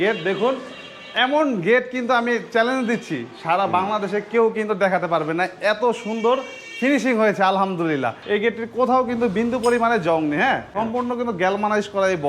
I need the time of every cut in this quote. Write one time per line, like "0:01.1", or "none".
0:08.2
0:10.7